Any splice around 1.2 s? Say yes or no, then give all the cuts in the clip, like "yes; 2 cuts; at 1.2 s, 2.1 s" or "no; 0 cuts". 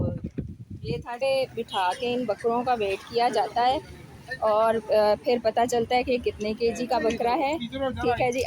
yes; 1 cut; at 1.2 s